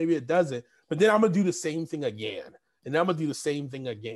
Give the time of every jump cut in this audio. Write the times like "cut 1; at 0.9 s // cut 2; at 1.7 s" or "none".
none